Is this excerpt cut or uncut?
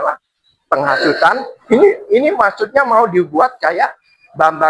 cut